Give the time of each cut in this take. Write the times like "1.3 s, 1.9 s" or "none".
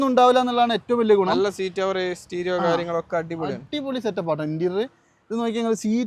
none